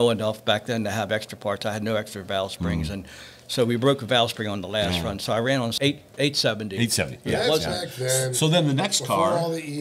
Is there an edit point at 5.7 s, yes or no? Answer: yes